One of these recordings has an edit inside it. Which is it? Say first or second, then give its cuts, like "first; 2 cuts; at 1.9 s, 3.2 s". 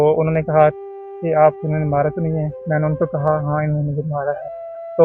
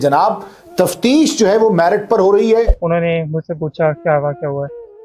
second; 1 cut; at 2.8 s